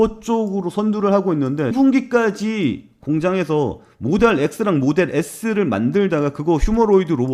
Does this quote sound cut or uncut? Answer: cut